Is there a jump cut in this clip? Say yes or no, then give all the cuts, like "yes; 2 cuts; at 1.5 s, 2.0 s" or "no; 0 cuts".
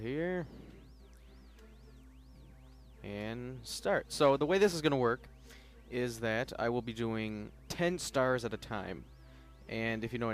no; 0 cuts